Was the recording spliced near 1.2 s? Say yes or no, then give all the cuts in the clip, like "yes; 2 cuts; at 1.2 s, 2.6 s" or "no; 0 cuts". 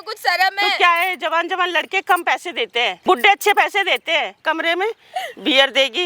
no; 2 cuts; at 3.0 s, 4.4 s